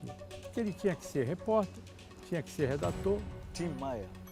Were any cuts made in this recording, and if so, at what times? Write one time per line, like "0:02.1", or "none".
0:03.4